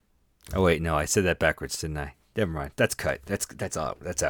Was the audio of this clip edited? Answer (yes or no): no